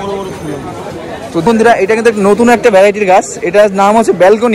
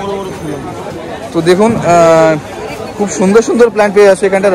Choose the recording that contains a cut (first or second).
first